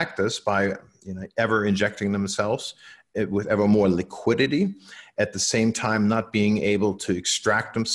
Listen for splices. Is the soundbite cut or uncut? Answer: uncut